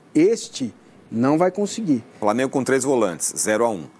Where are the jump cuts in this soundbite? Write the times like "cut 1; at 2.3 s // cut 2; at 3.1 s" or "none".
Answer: cut 1; at 2.1 s